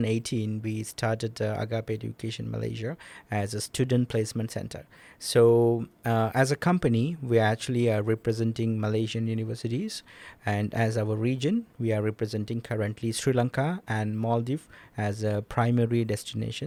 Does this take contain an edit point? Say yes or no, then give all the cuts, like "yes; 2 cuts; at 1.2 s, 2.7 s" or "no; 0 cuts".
no; 0 cuts